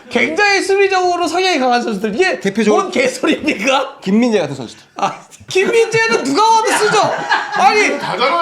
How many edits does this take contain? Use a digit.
1